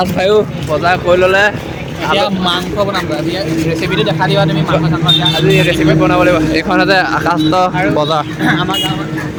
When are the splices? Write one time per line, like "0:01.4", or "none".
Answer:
none